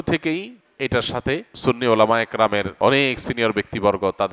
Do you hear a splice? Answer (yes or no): yes